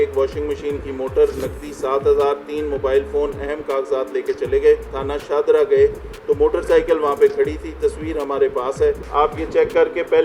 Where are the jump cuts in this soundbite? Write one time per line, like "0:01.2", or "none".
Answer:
0:05.0
0:09.0